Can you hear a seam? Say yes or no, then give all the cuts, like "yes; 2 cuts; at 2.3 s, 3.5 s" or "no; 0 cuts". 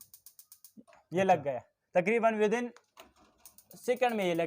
no; 0 cuts